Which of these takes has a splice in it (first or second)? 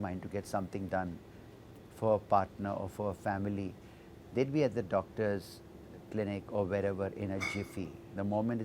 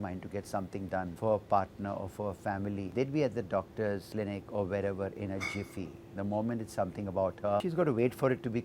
second